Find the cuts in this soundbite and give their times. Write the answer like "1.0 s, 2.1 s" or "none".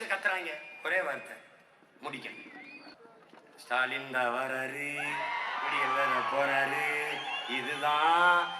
2.9 s